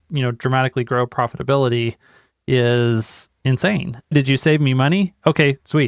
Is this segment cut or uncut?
cut